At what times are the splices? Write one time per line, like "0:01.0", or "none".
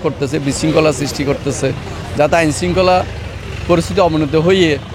none